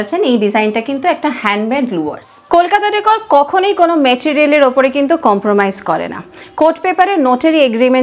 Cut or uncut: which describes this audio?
uncut